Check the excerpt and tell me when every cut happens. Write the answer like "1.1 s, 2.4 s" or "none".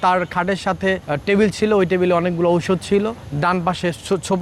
1.1 s, 3.2 s

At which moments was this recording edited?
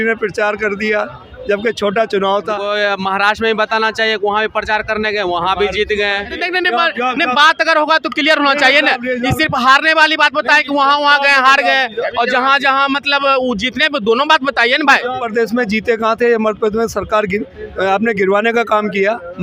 2.6 s, 6.4 s, 15.2 s

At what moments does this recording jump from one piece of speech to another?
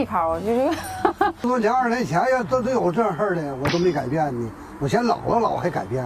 1.4 s

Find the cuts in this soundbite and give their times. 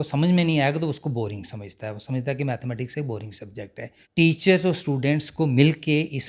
4.0 s

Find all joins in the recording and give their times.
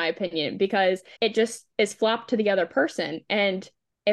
none

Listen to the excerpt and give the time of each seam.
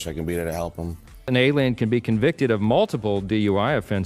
none

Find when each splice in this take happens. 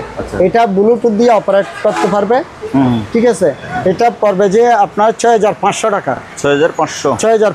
none

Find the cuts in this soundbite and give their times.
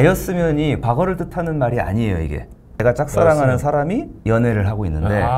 2.8 s, 4.1 s

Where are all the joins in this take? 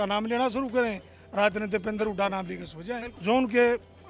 3.1 s

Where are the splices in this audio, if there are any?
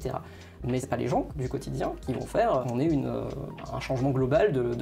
0.8 s, 2.6 s, 3.5 s

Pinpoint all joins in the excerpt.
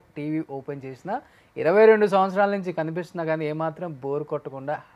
none

